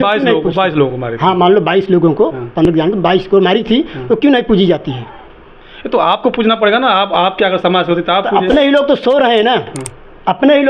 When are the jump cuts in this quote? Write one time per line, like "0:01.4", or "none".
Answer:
none